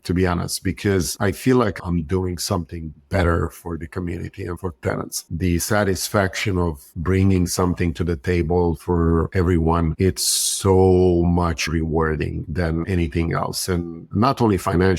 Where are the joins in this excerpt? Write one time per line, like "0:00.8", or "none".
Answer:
0:05.2